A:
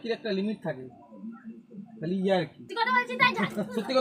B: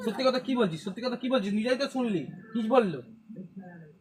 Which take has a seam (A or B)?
A